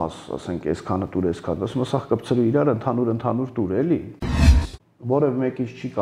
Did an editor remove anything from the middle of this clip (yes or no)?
yes